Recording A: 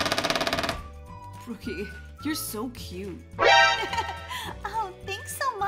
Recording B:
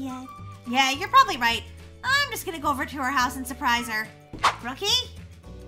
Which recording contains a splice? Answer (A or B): B